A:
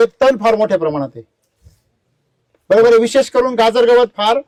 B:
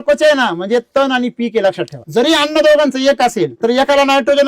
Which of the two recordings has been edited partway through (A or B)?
B